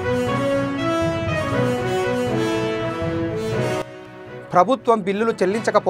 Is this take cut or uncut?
cut